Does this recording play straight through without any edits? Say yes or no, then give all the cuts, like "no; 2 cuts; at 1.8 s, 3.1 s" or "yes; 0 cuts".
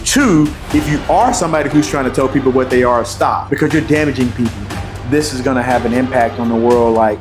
no; 2 cuts; at 3.4 s, 4.6 s